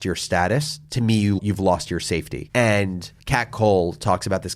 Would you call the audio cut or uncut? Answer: cut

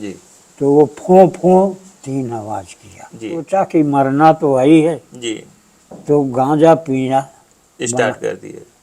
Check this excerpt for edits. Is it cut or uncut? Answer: cut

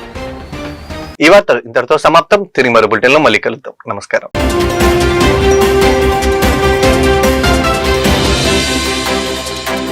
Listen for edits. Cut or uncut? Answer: uncut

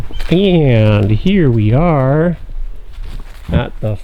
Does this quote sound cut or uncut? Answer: uncut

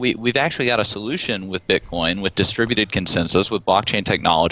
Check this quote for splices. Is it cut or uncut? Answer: uncut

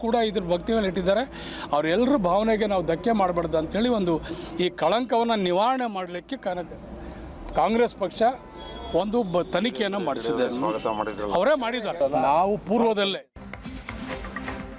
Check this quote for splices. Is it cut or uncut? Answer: cut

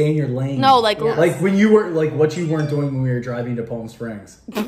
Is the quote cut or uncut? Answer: uncut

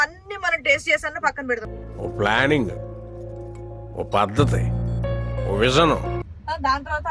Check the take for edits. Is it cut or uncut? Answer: cut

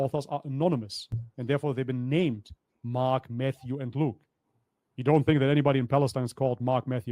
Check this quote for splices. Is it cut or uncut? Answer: uncut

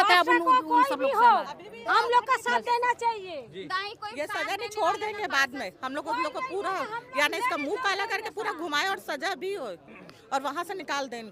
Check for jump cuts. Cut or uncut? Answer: uncut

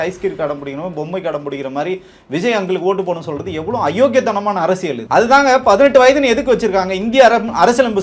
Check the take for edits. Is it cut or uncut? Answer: cut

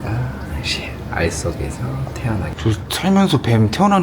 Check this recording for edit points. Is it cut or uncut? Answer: cut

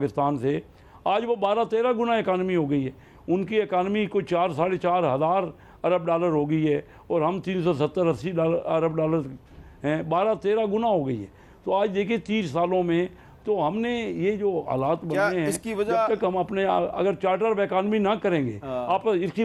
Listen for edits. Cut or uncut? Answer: uncut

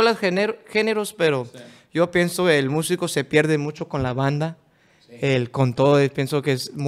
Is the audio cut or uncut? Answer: uncut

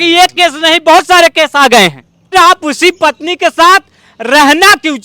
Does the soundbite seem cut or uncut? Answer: cut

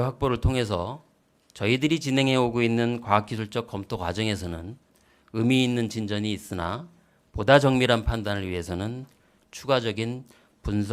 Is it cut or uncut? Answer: uncut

